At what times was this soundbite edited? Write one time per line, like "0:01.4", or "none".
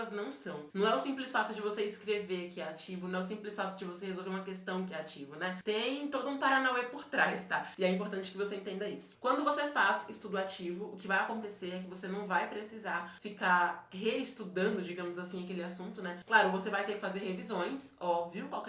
0:09.1